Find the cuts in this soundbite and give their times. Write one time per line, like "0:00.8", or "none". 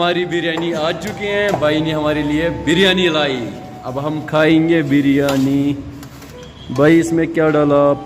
none